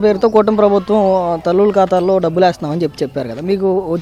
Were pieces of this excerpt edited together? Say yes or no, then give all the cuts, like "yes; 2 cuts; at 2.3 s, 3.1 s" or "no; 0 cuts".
no; 0 cuts